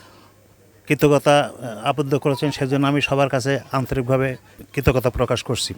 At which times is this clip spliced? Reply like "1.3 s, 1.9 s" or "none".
4.6 s